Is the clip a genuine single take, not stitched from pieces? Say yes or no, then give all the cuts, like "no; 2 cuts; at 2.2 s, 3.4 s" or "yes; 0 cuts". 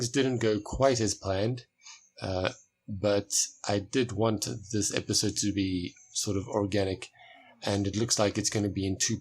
no; 1 cut; at 7.7 s